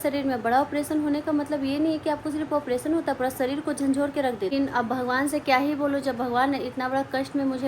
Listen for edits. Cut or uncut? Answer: cut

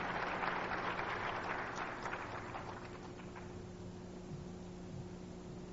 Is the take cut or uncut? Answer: uncut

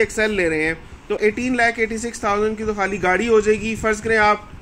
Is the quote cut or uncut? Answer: uncut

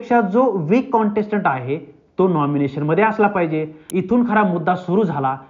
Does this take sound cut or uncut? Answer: cut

